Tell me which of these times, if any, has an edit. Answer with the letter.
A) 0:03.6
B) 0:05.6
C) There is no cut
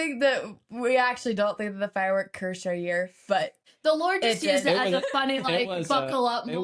A